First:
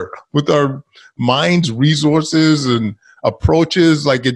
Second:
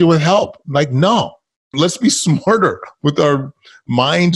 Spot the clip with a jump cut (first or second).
second